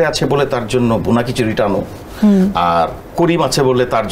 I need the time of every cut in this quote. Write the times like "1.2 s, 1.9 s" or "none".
3.0 s